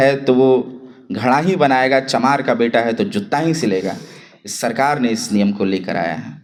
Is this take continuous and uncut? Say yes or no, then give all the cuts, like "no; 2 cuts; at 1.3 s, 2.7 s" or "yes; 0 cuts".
yes; 0 cuts